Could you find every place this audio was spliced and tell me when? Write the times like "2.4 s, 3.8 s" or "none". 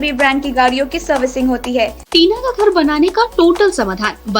2.0 s